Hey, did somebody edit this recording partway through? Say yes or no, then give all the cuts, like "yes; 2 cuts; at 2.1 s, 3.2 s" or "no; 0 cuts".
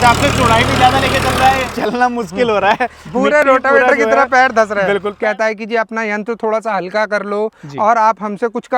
yes; 2 cuts; at 1.7 s, 5.1 s